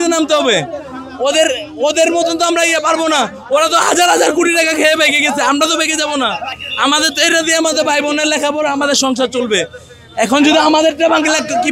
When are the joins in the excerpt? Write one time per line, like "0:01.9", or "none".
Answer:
none